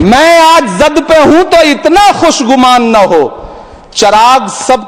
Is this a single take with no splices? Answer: yes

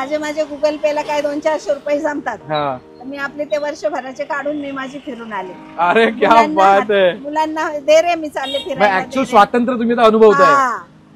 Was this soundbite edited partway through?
no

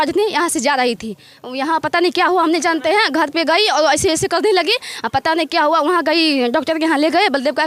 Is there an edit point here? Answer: no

